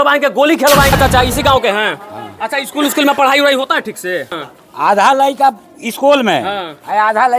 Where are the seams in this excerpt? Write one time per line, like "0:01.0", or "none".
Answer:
0:00.9
0:04.3